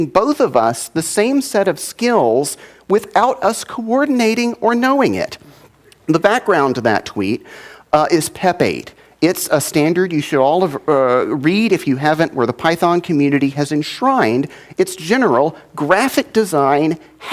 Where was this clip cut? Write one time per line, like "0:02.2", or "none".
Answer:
0:05.8